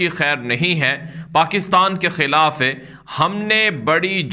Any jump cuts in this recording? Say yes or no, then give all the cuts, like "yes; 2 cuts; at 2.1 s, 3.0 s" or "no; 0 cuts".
no; 0 cuts